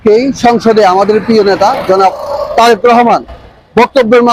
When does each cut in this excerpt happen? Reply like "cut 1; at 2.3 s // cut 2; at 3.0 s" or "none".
none